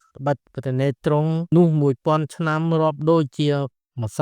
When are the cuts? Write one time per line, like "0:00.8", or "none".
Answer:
0:01.5